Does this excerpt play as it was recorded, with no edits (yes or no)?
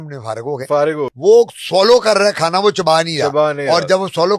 no